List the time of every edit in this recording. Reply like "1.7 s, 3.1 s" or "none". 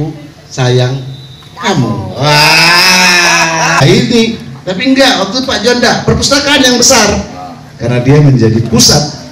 3.8 s